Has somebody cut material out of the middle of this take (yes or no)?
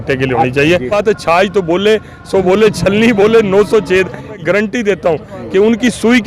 yes